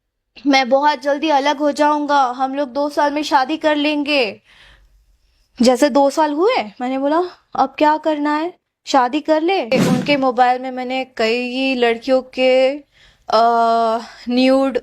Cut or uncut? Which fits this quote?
cut